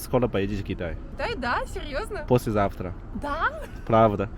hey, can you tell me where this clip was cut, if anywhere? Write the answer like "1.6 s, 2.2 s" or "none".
1.1 s